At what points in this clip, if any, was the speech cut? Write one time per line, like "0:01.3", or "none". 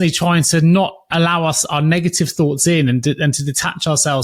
none